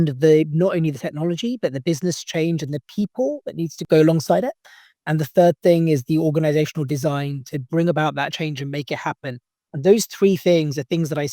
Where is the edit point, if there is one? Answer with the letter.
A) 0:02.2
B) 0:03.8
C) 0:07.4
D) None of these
B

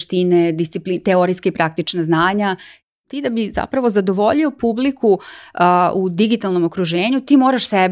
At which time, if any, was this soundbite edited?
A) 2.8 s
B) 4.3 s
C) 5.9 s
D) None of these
A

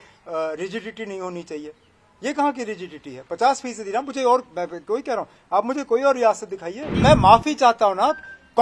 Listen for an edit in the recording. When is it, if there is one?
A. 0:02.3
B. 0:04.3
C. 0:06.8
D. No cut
C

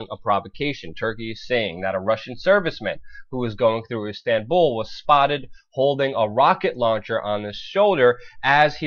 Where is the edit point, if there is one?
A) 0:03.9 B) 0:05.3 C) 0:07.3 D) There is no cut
B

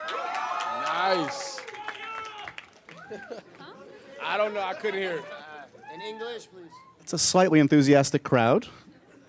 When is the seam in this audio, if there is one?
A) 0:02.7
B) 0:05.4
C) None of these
A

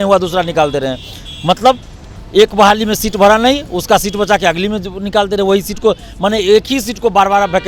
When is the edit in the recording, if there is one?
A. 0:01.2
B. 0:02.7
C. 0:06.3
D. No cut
D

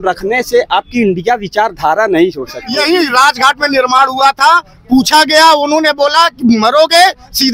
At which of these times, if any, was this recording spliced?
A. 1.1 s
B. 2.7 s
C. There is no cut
B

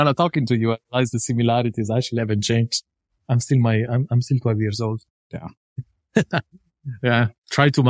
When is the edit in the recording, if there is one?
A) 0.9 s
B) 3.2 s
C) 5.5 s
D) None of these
C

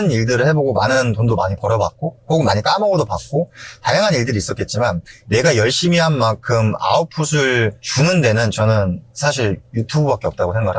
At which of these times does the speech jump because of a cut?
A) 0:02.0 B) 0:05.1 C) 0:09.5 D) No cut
B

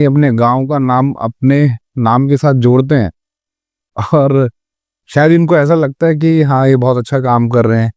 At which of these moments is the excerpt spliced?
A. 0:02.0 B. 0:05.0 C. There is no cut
C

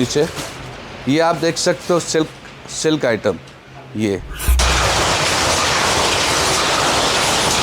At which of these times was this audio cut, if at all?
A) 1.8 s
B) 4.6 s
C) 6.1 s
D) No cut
B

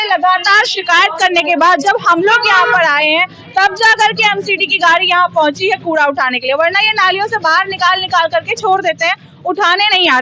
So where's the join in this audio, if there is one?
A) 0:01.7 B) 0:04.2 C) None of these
C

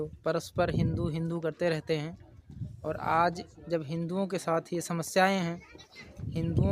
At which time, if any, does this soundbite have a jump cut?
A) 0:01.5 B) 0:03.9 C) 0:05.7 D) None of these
D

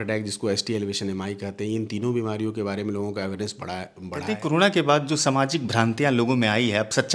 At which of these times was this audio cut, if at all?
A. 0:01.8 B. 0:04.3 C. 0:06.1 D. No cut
B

